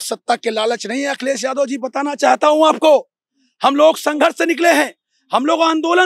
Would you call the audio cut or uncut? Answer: uncut